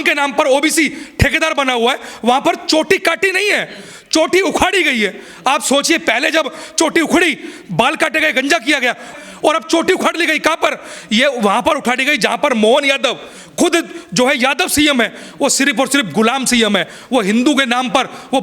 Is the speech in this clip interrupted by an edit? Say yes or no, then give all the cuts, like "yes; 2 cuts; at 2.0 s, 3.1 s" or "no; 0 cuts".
no; 0 cuts